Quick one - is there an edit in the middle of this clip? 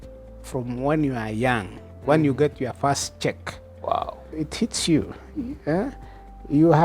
yes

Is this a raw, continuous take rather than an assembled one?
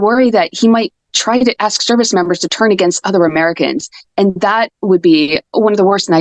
yes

